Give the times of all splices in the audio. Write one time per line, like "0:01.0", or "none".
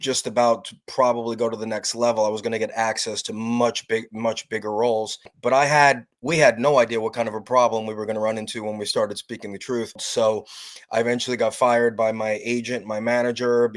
0:05.3
0:10.0